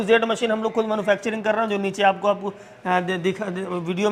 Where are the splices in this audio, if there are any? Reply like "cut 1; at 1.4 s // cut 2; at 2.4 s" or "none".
none